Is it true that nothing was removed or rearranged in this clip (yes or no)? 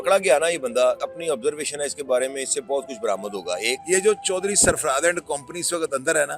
no